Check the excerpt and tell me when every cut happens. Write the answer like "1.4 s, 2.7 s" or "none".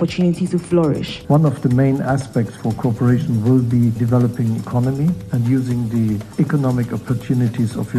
1.1 s, 4.0 s, 5.3 s, 6.3 s